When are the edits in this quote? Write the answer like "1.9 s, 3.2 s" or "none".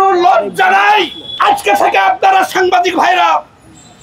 1.2 s